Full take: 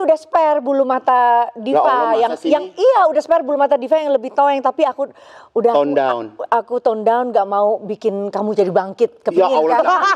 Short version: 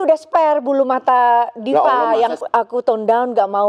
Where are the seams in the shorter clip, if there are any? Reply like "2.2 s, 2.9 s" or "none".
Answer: 2.4 s